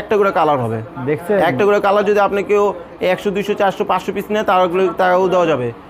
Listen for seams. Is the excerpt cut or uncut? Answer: uncut